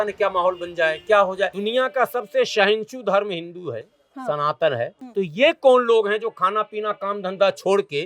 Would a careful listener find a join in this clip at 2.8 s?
no; 2 cuts; at 1.6 s, 5.0 s

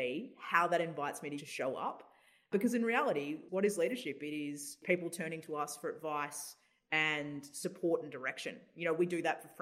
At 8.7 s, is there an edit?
no; 4 cuts; at 1.4 s, 2.5 s, 3.4 s, 4.8 s

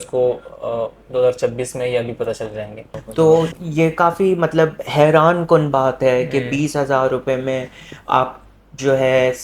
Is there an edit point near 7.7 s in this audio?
no; 1 cut; at 3.0 s

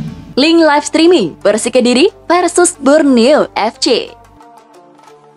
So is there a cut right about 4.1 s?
yes; 1 cut; at 4.1 s

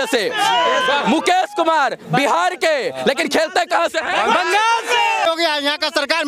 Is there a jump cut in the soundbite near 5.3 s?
yes; 1 cut; at 5.3 s

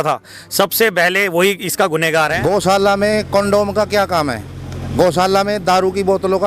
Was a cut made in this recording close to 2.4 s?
yes; 1 cut; at 2.4 s

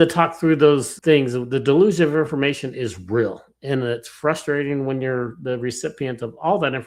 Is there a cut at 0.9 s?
yes; 1 cut; at 0.9 s

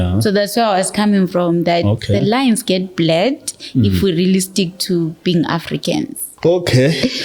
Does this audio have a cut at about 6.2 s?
yes; 1 cut; at 6.2 s

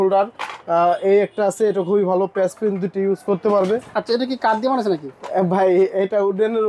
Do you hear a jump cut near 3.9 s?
yes; 1 cut; at 3.9 s

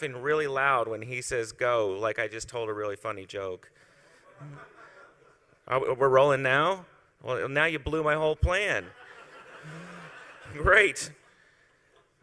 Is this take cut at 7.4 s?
no; 0 cuts

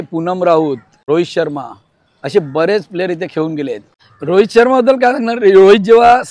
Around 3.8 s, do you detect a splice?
yes; 2 cuts; at 0.9 s, 3.8 s

